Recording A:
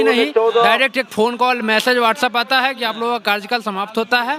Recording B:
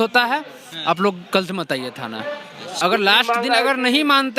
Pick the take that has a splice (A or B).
B